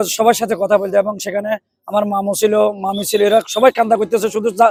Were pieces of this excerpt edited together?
no; 0 cuts

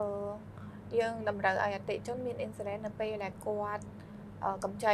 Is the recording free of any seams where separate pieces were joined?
yes; 0 cuts

